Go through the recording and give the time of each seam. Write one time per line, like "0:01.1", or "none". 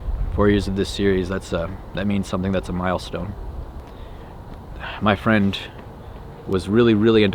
0:03.8